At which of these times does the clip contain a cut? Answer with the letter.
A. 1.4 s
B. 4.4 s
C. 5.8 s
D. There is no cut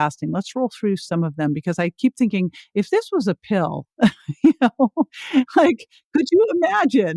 D